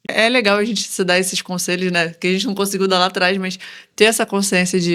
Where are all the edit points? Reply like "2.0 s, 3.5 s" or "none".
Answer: none